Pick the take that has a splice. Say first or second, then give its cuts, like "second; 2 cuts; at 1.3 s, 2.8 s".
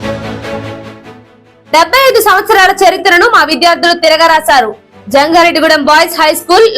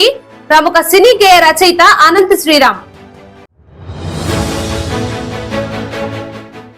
first; 1 cut; at 0.9 s